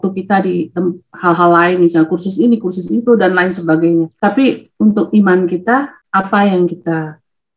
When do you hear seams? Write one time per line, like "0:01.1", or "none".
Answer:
0:04.1
0:06.0